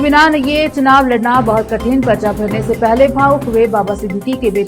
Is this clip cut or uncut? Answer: uncut